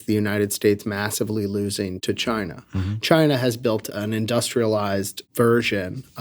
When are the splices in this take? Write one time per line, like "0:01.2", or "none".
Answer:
0:02.0
0:03.8
0:05.2

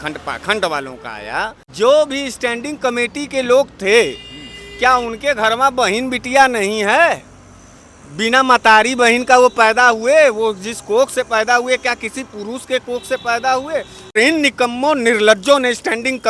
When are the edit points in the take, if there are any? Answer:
0:01.6
0:14.2

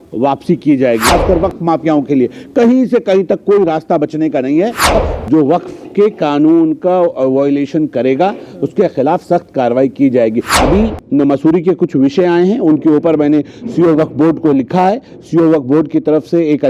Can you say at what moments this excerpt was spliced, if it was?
0:01.1
0:04.9
0:10.5

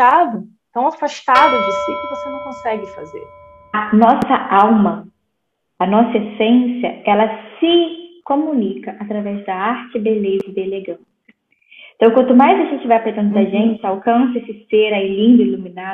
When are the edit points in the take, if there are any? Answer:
0:03.8

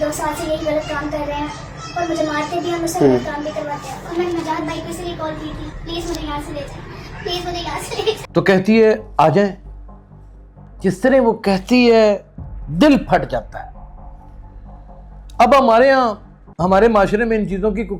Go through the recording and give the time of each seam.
0:08.2

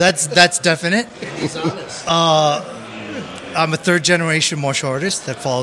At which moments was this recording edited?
none

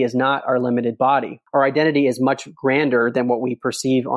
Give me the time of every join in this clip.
0:01.4

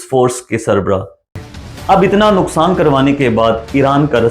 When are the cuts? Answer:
0:01.3

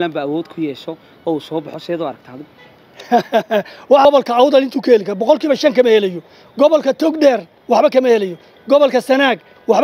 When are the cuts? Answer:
0:04.1

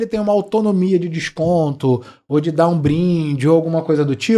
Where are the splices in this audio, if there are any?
none

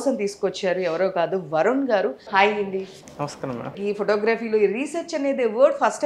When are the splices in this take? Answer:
0:02.3
0:03.7

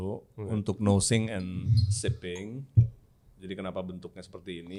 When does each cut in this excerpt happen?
none

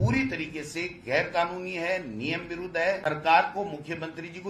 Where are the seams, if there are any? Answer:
0:03.0

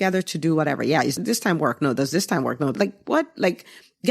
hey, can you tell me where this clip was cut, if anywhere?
0:01.2
0:02.7

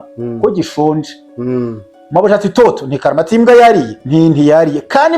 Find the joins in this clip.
0:04.0

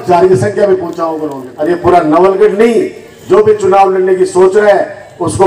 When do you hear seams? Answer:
0:01.4

